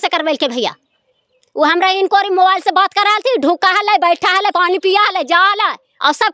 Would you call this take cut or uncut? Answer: uncut